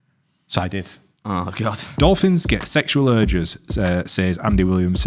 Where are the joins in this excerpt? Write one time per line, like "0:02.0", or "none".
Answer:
0:01.8